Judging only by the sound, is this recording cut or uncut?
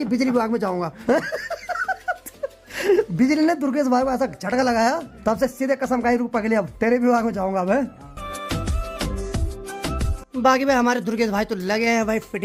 uncut